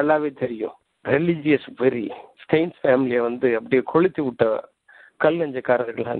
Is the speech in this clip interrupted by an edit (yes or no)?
yes